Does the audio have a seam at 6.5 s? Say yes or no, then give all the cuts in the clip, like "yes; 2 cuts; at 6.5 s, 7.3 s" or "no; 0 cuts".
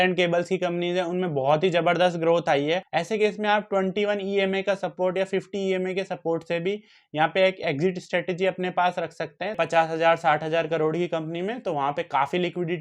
no; 2 cuts; at 2.9 s, 9.6 s